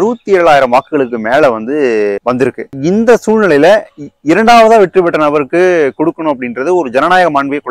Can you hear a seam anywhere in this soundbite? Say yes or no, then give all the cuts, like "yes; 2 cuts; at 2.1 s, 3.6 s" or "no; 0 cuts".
yes; 1 cut; at 2.8 s